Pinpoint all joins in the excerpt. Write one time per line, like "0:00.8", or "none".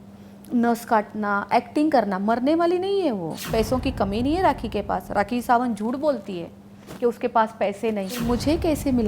0:03.3
0:08.2

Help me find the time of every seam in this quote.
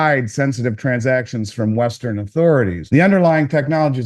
0:02.8

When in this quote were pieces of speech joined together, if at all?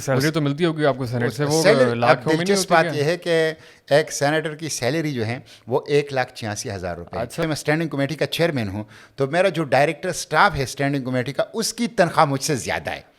0:07.4

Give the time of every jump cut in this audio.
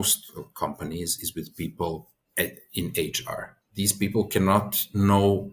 0:02.2
0:03.6

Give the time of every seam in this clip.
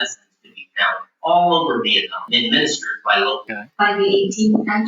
0:03.5

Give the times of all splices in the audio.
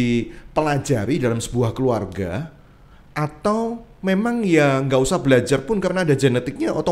none

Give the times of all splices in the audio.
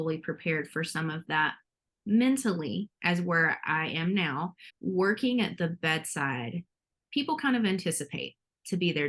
0:04.7

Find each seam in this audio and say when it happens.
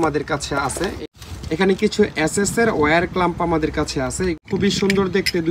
0:01.0
0:04.3

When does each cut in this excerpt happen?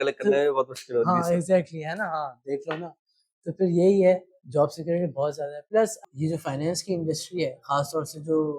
0:06.0

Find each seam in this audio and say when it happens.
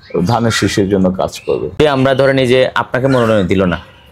0:01.8

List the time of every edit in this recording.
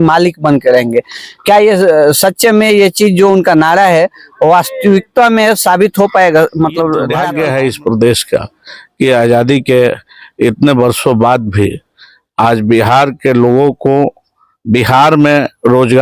0:07.2

